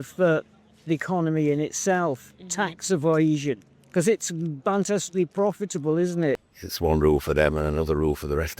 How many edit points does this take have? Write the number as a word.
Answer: one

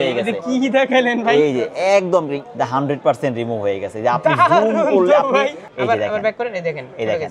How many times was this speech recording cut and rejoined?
two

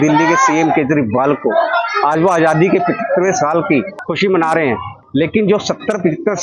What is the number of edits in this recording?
two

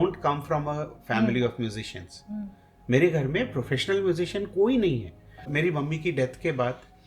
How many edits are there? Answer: one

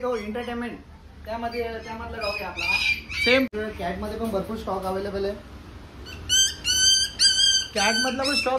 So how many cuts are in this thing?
one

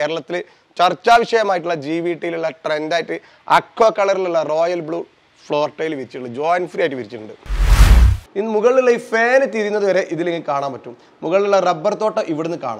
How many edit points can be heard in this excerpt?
one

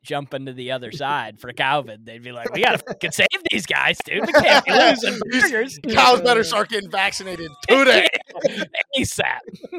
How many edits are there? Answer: zero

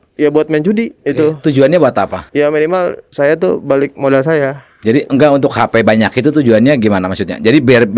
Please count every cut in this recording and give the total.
three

